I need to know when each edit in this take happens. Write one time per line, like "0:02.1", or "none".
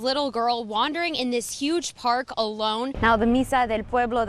0:02.9

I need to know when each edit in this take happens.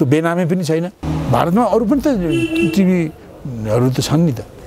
0:01.0

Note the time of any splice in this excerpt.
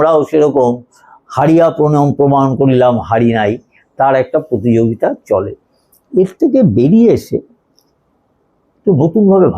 none

